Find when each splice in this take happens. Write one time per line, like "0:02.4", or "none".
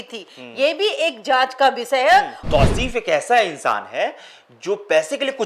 0:02.4